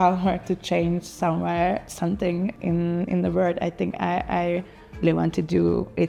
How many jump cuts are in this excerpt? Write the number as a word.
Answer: zero